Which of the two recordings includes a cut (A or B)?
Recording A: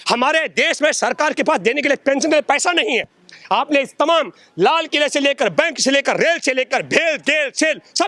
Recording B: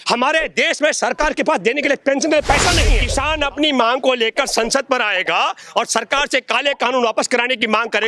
B